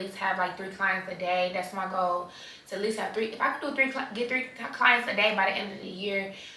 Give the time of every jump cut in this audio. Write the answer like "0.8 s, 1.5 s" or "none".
none